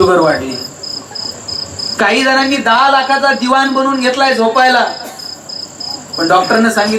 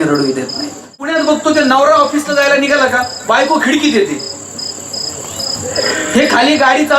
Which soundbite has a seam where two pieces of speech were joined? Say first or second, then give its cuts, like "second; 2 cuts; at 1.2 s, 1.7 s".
second; 1 cut; at 1.1 s